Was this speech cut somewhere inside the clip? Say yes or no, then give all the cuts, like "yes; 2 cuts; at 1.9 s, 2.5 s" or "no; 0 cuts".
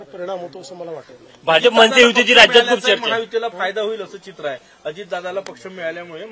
no; 0 cuts